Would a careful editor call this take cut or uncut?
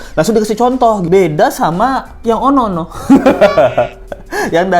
cut